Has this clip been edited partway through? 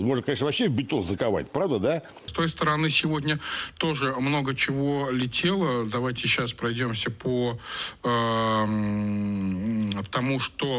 yes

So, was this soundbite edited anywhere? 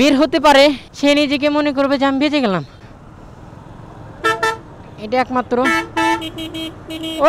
yes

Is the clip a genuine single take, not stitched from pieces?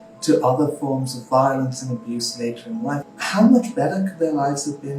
no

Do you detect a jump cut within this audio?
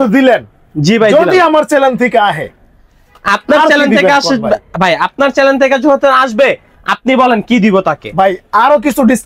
no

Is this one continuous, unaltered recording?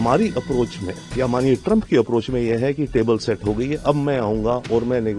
yes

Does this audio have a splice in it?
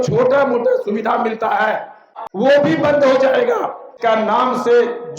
yes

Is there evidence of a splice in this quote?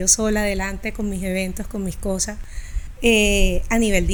no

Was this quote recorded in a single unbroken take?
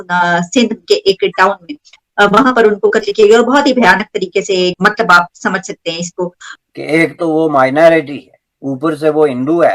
no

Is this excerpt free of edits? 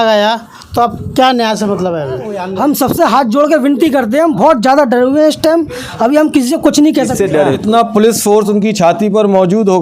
no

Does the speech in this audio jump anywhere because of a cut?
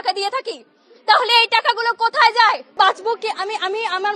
yes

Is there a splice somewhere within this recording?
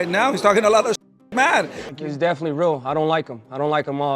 yes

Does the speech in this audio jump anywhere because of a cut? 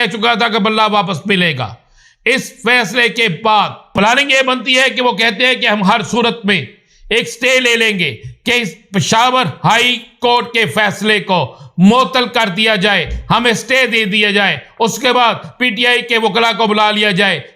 yes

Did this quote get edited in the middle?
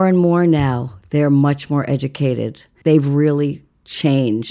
yes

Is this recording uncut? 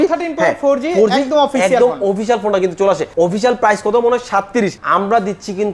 no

